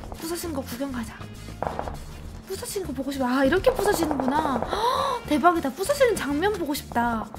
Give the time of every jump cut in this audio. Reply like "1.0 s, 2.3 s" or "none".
none